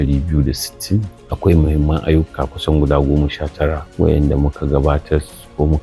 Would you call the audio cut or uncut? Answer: cut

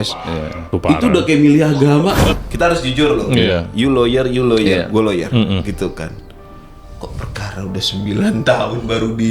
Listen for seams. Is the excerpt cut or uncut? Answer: cut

